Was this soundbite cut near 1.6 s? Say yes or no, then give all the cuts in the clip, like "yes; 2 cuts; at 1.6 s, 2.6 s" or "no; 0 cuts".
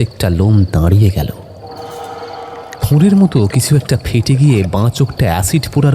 yes; 2 cuts; at 1.6 s, 2.7 s